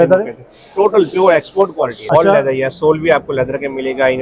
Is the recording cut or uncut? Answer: cut